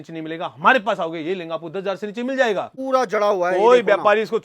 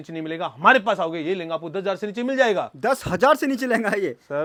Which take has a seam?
first; 1 cut; at 2.7 s

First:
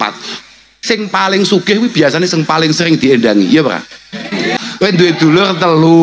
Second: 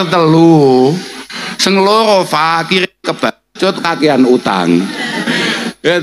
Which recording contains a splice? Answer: first; 1 cut; at 4.6 s

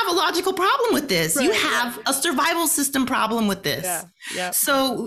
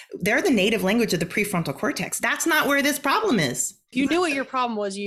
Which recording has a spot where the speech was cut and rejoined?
second; 1 cut; at 3.9 s

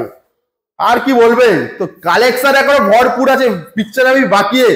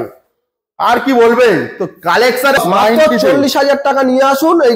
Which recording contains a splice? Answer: second; 1 cut; at 2.6 s

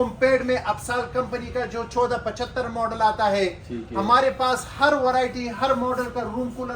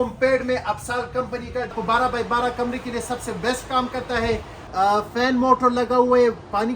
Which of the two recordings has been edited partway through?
second; 2 cuts; at 1.7 s, 4.6 s

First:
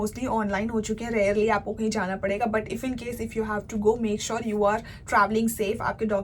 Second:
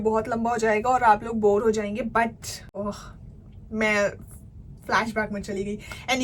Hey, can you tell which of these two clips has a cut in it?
second; 1 cut; at 2.5 s

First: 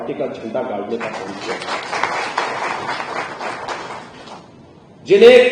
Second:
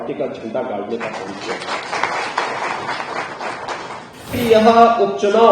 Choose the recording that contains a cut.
second; 1 cut; at 4.3 s

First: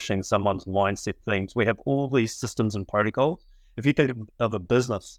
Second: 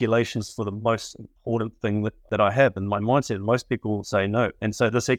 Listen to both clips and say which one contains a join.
second; 1 cut; at 2.2 s

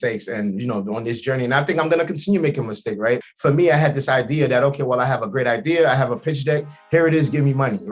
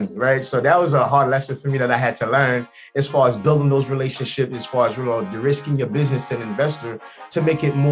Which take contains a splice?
first; 1 cut; at 3.2 s

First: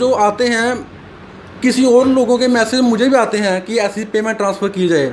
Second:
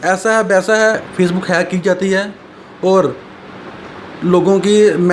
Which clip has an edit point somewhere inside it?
second; 1 cut; at 1.1 s

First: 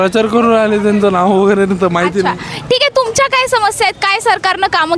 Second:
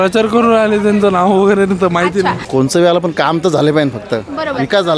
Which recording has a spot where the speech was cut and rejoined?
second; 1 cut; at 2.4 s

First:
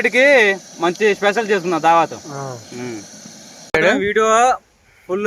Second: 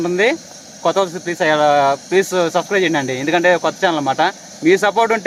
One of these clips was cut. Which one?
first; 1 cut; at 3.7 s

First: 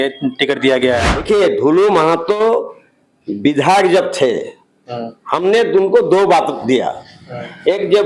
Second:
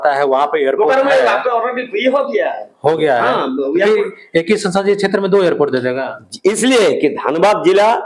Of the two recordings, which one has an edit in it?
first; 1 cut; at 1.2 s

